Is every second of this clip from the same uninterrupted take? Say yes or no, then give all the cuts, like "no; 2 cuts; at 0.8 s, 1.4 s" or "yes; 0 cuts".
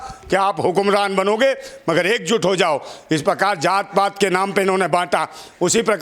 yes; 0 cuts